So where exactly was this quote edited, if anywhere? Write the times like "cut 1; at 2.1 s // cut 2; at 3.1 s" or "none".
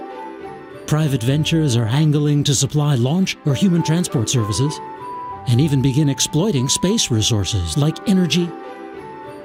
none